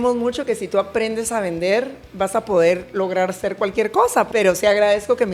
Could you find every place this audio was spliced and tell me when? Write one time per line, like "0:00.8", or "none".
0:04.3